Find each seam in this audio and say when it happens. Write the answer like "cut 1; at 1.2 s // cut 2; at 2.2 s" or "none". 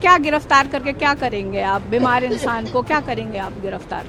none